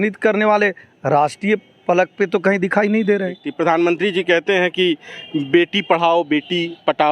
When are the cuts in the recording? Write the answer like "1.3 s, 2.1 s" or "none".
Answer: 3.4 s